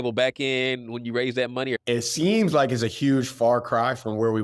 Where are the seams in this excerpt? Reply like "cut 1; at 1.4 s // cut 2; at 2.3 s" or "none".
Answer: cut 1; at 1.8 s